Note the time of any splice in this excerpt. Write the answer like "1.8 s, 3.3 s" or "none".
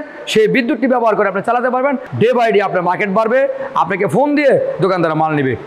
2.1 s